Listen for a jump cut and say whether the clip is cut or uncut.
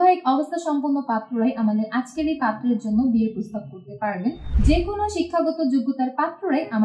cut